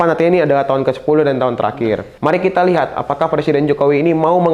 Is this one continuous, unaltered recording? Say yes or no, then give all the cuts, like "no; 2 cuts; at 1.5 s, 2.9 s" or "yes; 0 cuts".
no; 1 cut; at 2.1 s